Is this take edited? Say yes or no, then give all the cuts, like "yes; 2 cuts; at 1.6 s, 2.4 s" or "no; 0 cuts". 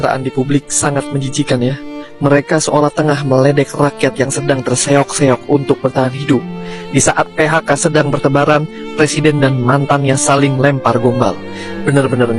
no; 0 cuts